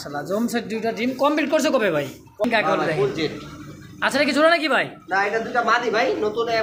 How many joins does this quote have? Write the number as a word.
one